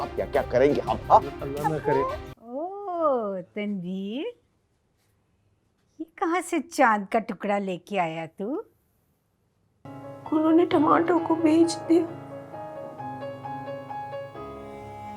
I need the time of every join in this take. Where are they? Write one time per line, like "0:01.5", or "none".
0:02.3
0:09.9